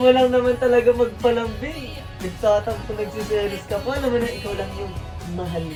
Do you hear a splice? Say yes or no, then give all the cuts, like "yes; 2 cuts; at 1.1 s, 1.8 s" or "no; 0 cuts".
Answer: no; 0 cuts